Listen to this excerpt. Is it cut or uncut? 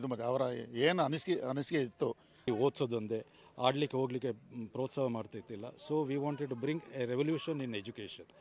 cut